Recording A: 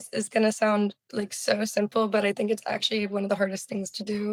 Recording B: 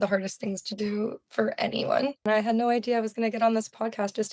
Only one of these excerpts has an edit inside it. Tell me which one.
B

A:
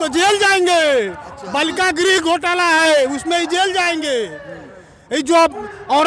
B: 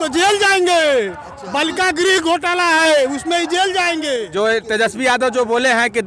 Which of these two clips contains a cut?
B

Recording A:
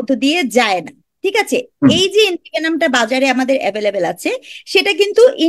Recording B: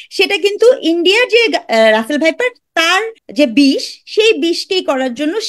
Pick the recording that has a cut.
B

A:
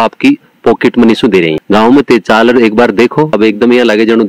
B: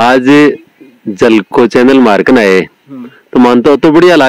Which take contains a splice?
A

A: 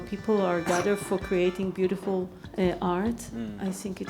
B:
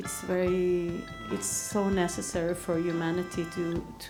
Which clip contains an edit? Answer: A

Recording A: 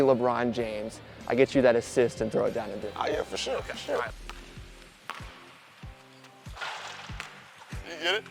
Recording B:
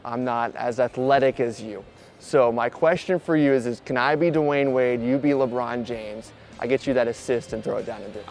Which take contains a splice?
A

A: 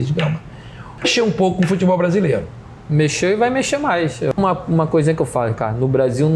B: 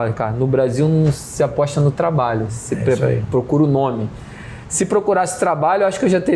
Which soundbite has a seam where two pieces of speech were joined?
A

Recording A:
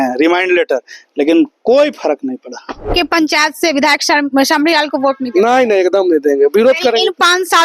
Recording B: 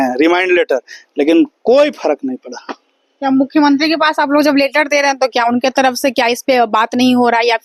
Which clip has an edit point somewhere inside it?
A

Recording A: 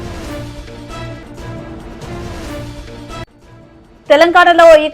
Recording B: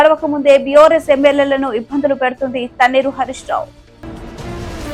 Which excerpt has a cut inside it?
A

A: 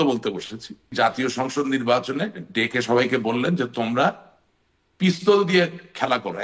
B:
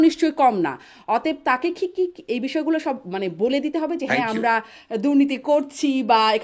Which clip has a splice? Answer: A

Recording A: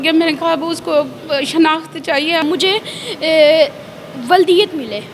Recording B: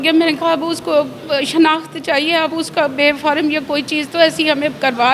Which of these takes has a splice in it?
A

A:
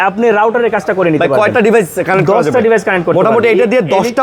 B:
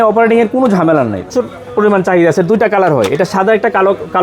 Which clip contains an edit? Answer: B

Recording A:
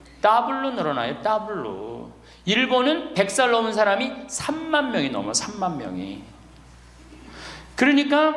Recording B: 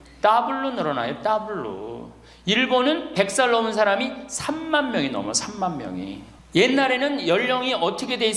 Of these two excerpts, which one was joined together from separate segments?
B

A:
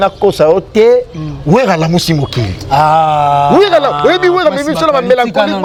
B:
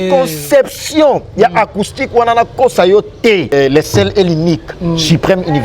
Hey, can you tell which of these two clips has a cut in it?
B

